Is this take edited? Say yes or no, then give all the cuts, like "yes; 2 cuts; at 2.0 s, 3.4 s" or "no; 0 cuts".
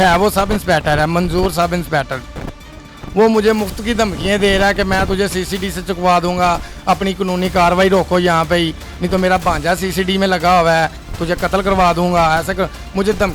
no; 0 cuts